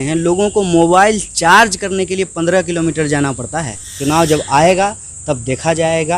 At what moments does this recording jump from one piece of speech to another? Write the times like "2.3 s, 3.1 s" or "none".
3.9 s